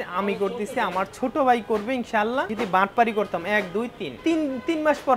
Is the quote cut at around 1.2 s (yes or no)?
no